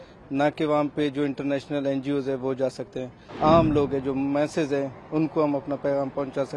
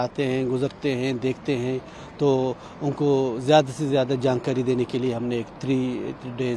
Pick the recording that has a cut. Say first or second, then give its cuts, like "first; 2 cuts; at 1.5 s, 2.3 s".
first; 1 cut; at 3.2 s